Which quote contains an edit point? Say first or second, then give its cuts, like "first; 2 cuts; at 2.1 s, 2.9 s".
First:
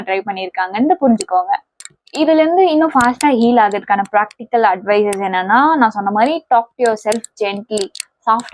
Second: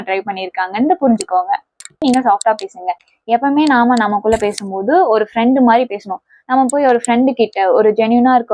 second; 1 cut; at 2.0 s